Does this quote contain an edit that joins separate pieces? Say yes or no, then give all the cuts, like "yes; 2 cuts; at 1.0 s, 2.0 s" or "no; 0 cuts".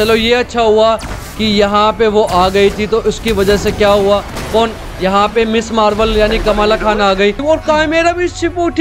yes; 1 cut; at 7.4 s